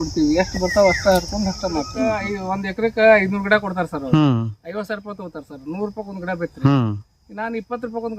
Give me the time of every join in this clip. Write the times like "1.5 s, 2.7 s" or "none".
2.3 s